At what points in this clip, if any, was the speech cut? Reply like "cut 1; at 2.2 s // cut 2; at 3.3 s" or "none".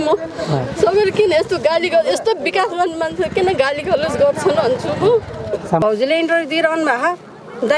cut 1; at 5.8 s